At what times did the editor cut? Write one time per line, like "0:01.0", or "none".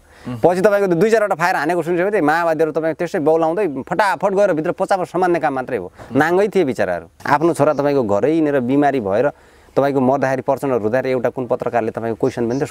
0:07.1

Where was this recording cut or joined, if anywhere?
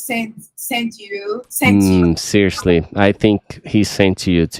none

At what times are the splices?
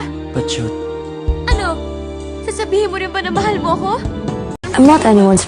0:04.5

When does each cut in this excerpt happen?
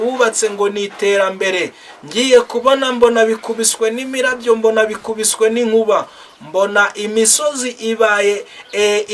none

